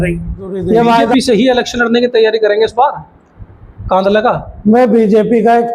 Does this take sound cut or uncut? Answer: cut